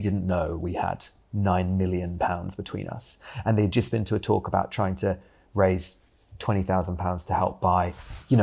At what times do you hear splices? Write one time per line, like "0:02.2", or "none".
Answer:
none